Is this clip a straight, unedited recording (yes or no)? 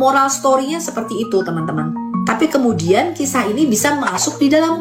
yes